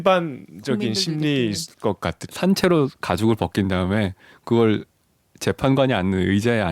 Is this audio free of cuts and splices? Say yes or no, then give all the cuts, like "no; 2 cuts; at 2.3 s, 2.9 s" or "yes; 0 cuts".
no; 1 cut; at 2.2 s